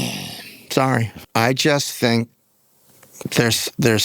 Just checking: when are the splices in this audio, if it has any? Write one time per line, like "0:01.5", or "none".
0:01.2